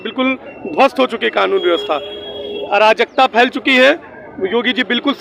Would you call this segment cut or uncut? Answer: uncut